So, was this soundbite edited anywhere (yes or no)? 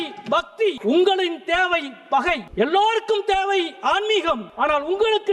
yes